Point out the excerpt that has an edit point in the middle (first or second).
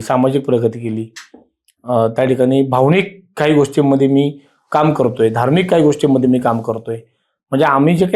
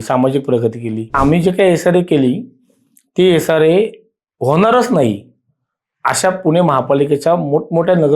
second